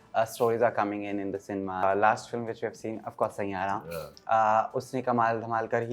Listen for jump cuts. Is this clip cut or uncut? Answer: cut